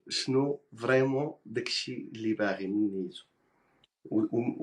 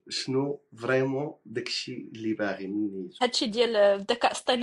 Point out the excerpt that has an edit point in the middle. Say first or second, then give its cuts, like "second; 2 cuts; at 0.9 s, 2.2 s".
second; 1 cut; at 3.0 s